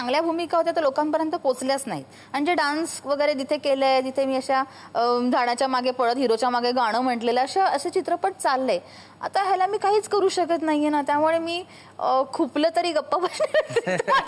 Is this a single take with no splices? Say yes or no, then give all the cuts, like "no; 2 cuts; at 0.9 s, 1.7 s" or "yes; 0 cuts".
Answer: yes; 0 cuts